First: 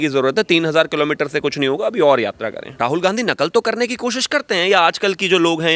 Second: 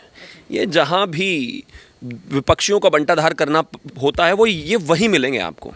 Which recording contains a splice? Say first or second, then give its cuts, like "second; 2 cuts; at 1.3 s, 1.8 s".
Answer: first; 1 cut; at 2.6 s